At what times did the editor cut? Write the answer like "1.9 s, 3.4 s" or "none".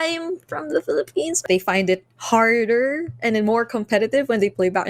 1.4 s